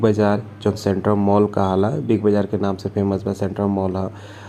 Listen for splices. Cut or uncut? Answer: uncut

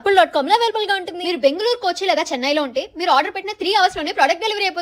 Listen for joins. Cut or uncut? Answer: uncut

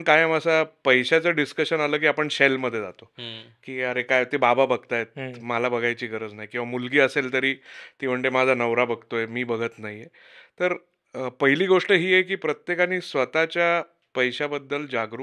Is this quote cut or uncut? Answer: uncut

